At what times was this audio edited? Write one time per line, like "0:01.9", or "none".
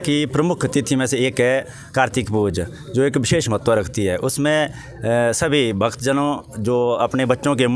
none